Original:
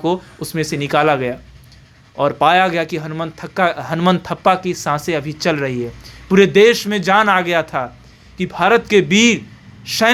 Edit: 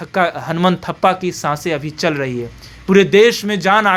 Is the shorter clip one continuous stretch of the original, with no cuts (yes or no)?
yes